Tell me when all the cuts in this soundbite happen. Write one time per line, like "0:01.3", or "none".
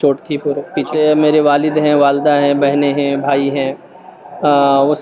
0:00.9